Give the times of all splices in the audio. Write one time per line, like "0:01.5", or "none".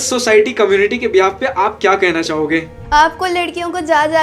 0:02.8

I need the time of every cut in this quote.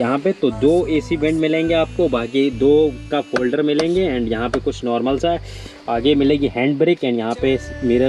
none

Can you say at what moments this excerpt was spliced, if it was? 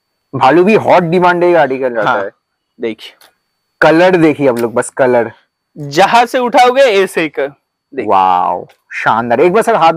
none

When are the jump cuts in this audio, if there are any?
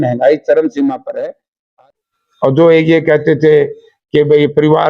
0:02.0

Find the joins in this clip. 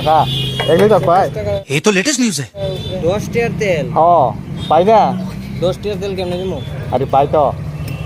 0:02.9
0:04.6
0:06.8

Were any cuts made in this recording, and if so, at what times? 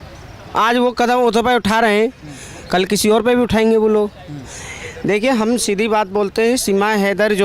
none

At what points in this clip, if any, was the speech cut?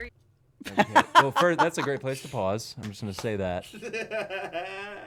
none

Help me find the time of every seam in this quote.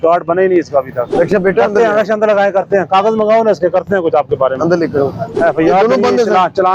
0:01.0
0:05.2

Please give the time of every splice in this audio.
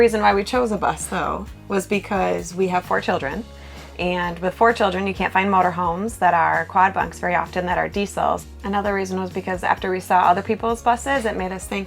none

